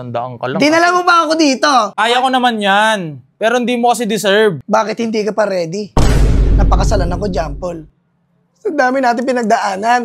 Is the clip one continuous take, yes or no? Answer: no